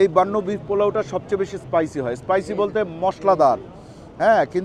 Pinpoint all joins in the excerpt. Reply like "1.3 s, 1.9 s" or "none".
none